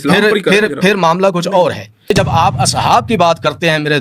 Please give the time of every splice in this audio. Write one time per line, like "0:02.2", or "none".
0:02.1